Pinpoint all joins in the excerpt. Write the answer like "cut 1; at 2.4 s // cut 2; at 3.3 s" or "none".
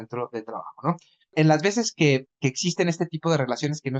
cut 1; at 1.3 s